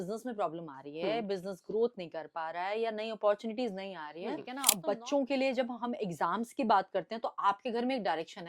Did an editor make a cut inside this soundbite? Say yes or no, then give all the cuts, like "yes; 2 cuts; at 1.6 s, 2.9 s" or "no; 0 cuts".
yes; 1 cut; at 4.6 s